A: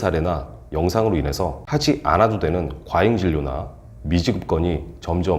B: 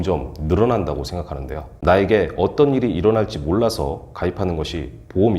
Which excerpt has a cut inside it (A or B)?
B